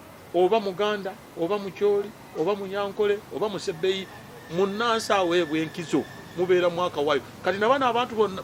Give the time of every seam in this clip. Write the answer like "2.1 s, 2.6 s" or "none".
none